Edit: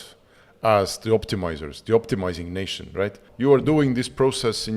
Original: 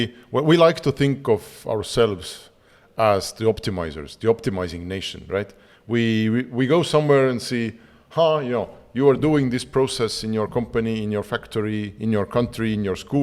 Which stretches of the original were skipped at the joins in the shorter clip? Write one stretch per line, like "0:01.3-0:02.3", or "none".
0:05.6-0:08.8